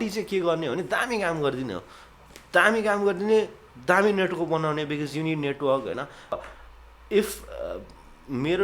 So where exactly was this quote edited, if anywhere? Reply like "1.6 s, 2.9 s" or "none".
6.3 s

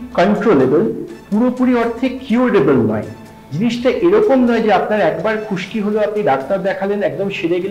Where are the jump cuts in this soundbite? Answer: none

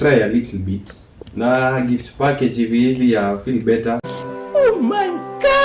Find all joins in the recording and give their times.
none

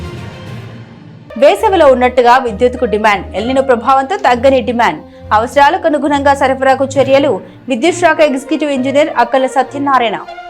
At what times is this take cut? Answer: 1.1 s

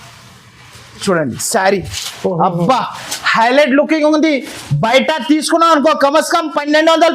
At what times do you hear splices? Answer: 1.0 s

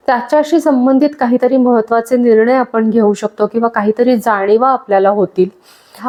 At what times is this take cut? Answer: none

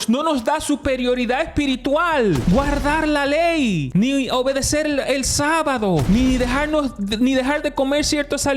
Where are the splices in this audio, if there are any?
2.4 s, 3.8 s, 6.0 s

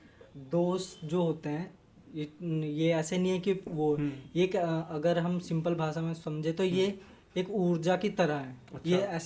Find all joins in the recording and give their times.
none

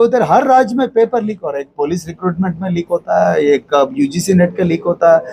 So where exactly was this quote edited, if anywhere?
none

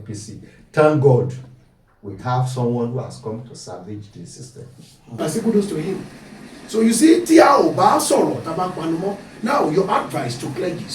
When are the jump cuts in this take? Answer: 5.2 s

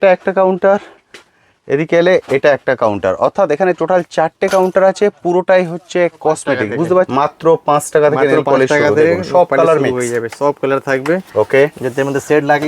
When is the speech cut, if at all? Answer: 7.1 s

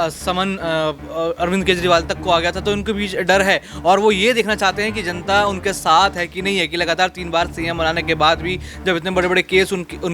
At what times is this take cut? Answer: none

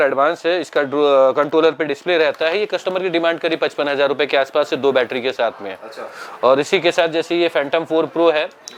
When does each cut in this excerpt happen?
none

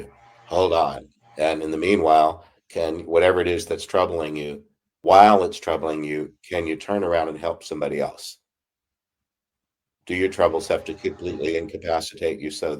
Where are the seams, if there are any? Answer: 5.1 s

